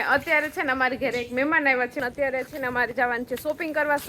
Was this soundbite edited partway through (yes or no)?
yes